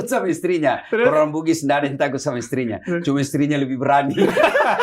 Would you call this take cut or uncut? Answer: uncut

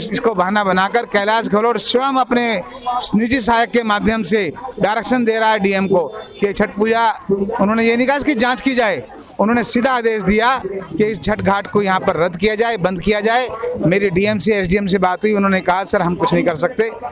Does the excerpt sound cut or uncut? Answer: uncut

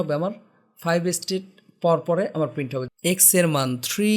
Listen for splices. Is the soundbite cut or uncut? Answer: cut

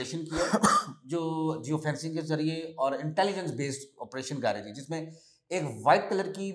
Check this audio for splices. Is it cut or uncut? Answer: uncut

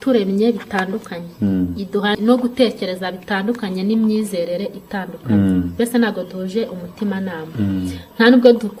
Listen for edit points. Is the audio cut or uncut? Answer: cut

